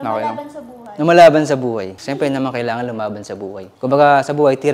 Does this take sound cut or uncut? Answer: cut